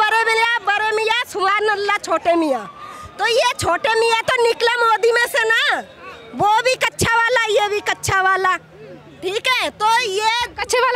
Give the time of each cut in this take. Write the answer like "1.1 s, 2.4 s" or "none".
none

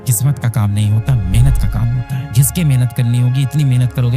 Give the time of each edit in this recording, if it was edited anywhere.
2.3 s

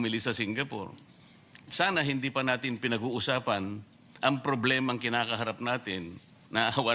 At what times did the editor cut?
none

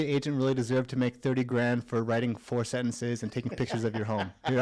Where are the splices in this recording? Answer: none

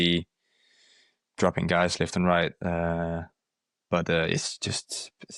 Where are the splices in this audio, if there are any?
none

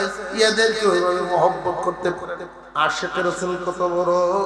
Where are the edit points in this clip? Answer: 2.6 s

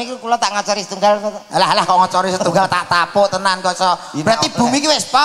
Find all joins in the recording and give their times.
none

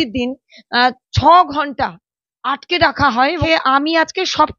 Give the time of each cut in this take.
3.4 s

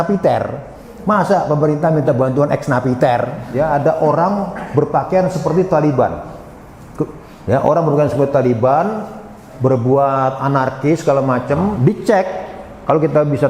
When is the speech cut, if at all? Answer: 3.4 s, 11.8 s

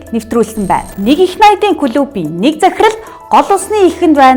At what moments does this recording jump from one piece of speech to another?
0.9 s

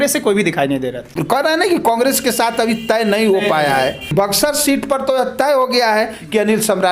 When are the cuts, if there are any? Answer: 1.1 s, 4.1 s

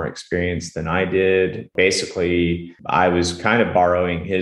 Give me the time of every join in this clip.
1.7 s, 2.7 s

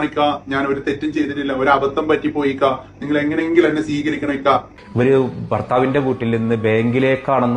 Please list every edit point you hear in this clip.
4.7 s

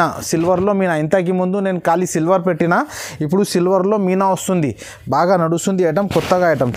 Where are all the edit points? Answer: none

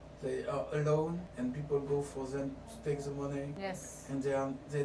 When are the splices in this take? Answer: 1.3 s, 3.5 s

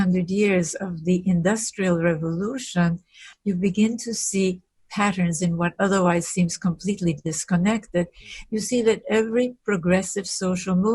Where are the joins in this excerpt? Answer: 3.3 s

